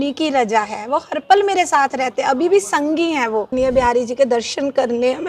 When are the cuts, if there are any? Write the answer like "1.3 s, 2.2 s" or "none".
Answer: 3.5 s